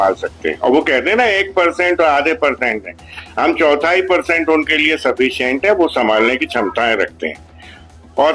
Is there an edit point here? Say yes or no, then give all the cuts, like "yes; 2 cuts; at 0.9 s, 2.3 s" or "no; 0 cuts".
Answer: no; 0 cuts